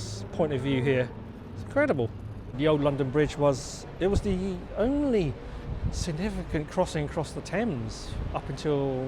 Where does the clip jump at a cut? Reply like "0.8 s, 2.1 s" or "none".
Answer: 2.6 s